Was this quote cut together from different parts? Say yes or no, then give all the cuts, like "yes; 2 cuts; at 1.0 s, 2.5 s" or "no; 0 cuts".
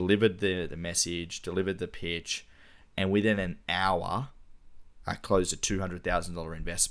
no; 0 cuts